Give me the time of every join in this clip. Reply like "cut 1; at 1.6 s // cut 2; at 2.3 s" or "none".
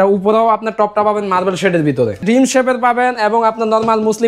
cut 1; at 2.2 s